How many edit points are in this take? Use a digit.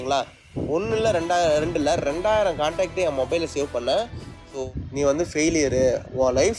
1